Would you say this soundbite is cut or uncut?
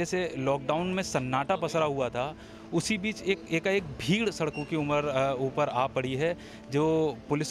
uncut